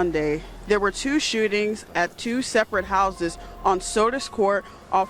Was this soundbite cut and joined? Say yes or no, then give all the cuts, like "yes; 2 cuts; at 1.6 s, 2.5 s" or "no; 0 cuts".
no; 0 cuts